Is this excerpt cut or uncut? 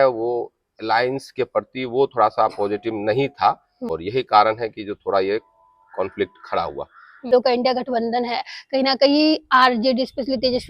cut